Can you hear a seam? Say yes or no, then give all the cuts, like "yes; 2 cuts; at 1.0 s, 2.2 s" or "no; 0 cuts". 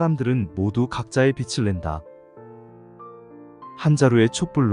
no; 0 cuts